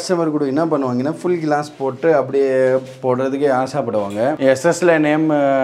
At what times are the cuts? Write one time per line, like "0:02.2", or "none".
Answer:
0:04.4